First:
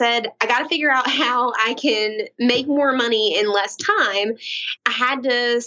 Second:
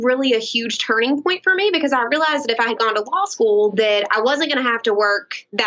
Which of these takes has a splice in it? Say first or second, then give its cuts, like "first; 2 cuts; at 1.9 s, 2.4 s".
first; 1 cut; at 4.7 s